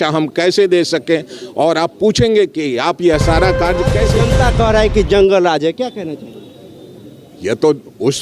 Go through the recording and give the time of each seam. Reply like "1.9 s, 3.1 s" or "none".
4.2 s